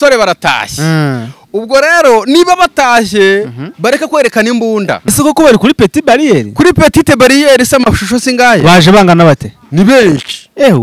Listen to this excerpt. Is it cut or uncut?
cut